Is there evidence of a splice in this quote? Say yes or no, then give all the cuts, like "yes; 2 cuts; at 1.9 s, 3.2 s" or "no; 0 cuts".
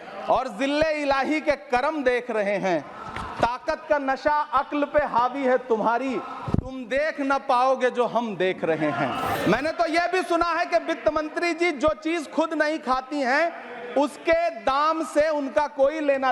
yes; 1 cut; at 9.4 s